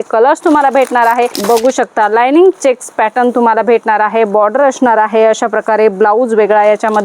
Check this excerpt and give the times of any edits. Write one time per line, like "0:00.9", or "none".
0:01.4